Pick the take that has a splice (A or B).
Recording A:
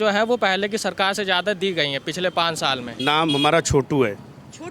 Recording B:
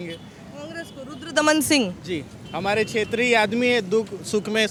A